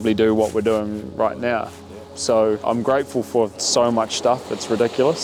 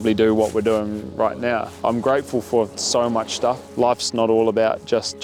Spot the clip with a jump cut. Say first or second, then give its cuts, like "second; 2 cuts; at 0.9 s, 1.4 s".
second; 2 cuts; at 1.8 s, 3.7 s